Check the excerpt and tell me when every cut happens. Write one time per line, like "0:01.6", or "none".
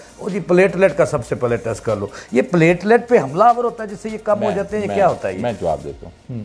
none